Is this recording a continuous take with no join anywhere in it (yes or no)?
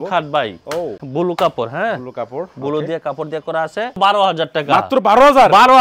no